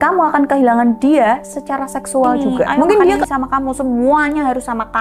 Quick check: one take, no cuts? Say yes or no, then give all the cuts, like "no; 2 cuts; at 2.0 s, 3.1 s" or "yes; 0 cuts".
no; 1 cut; at 3.2 s